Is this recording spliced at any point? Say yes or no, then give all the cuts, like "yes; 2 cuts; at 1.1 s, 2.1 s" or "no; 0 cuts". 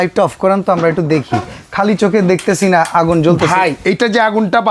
no; 0 cuts